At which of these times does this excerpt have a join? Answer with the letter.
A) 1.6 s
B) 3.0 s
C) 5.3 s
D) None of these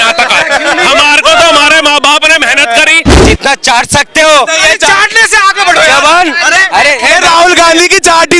B